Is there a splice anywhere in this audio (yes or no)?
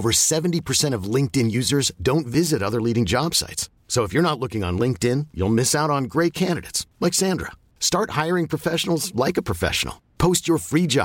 no